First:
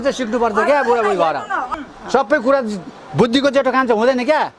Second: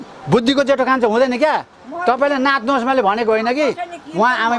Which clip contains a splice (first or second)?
first